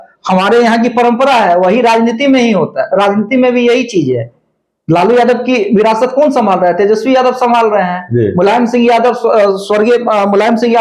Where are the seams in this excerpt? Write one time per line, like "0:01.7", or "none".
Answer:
none